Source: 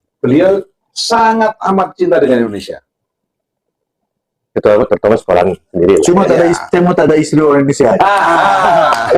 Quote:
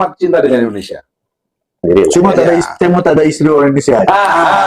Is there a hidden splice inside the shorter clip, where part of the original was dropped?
yes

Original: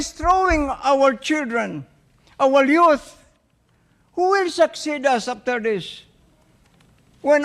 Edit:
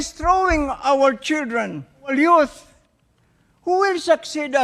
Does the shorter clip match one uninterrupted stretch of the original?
no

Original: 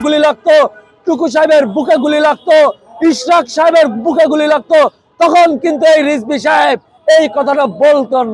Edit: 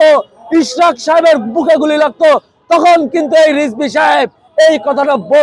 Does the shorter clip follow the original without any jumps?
yes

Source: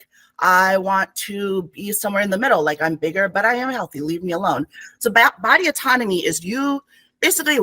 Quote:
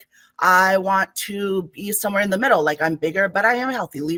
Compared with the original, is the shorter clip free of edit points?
yes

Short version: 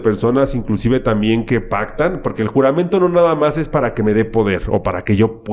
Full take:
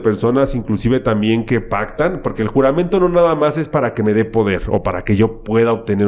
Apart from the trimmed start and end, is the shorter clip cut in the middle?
no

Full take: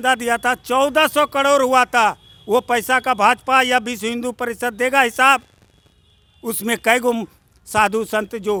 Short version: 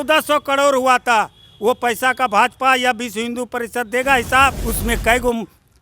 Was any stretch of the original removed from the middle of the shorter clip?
yes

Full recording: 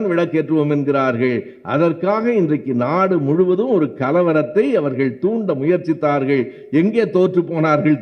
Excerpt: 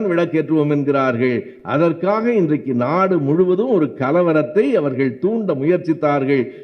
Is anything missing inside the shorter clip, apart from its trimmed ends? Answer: no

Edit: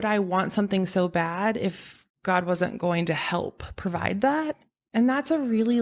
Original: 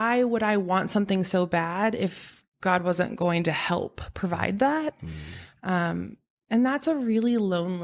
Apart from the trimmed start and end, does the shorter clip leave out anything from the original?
yes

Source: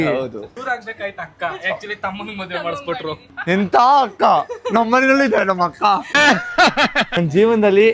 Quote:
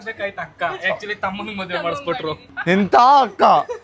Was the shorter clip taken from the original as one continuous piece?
yes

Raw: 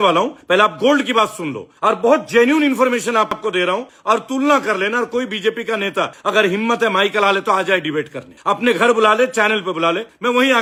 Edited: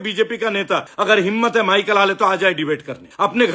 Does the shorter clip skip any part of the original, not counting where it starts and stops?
no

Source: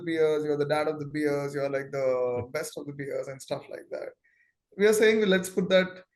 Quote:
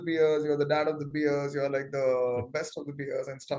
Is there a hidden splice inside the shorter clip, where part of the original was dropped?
no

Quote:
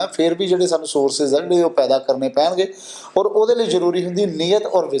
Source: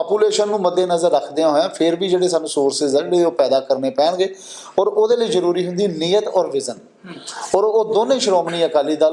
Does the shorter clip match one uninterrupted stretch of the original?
yes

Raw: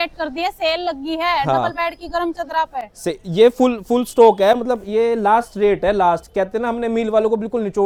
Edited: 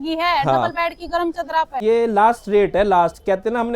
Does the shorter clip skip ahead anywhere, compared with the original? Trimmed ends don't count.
yes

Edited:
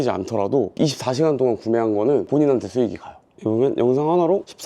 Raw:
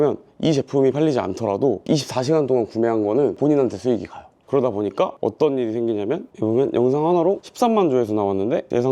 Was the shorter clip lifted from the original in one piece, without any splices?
no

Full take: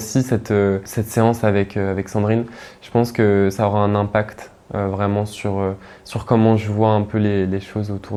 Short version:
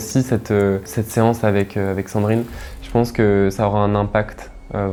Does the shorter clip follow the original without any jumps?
yes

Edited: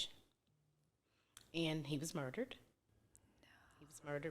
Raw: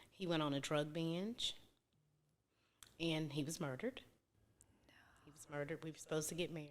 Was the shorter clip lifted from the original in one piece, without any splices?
yes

